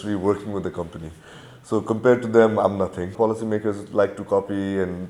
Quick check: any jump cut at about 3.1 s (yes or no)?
yes